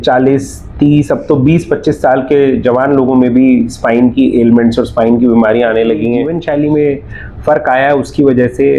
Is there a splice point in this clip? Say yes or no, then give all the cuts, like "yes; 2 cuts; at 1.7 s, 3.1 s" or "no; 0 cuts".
yes; 1 cut; at 6.3 s